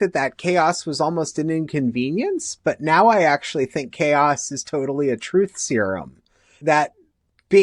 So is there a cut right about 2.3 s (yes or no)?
no